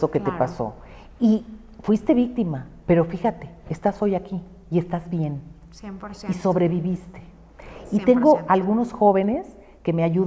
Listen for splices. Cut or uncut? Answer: uncut